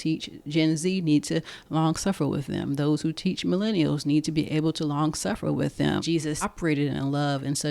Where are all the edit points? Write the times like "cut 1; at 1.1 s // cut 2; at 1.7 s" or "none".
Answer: cut 1; at 6.5 s